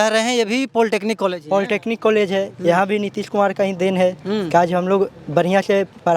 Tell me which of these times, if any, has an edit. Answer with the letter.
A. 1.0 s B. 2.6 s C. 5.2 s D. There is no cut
D